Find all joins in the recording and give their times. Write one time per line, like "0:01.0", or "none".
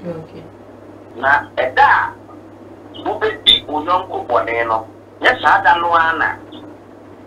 0:01.1